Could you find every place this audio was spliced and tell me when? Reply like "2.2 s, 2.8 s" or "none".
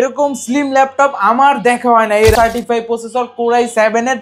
2.3 s